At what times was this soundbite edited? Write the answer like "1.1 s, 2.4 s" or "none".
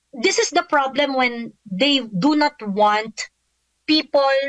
none